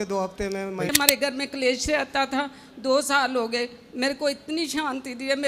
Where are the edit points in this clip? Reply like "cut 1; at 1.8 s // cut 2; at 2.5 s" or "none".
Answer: cut 1; at 0.9 s